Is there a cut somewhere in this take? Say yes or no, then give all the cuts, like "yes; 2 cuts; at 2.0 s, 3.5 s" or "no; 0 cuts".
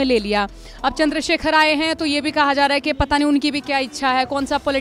no; 0 cuts